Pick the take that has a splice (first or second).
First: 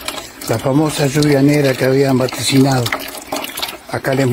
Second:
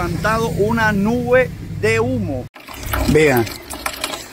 second